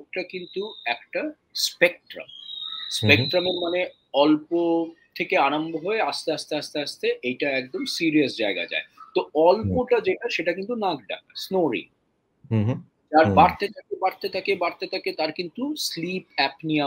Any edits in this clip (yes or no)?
no